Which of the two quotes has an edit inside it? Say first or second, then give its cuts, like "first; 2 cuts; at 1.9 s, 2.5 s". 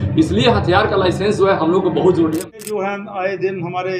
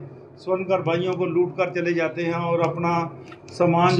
first; 1 cut; at 2.5 s